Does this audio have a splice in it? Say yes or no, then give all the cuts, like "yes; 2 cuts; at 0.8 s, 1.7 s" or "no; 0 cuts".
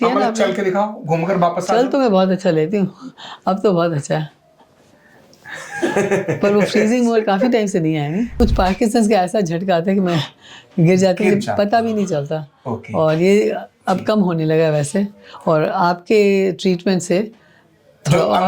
yes; 1 cut; at 8.3 s